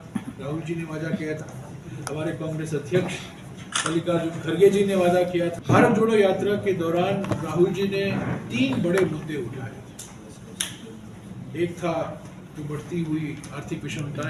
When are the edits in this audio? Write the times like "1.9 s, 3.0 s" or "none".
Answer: 5.6 s